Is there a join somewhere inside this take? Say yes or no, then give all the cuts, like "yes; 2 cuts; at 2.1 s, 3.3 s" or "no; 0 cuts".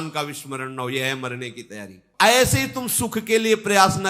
yes; 1 cut; at 2.0 s